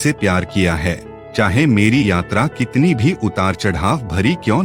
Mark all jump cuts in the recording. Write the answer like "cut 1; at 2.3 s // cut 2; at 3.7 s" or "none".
none